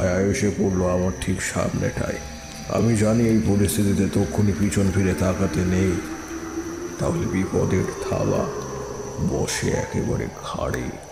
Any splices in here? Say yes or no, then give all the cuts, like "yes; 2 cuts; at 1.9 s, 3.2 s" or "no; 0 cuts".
no; 0 cuts